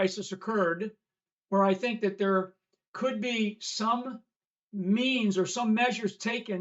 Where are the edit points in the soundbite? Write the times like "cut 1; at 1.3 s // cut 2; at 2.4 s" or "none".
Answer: cut 1; at 1.2 s